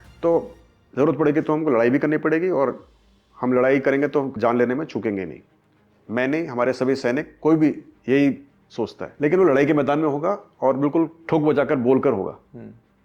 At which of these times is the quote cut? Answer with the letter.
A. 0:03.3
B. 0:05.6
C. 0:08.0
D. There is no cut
D